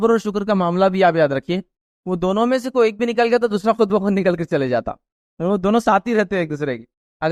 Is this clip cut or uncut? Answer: uncut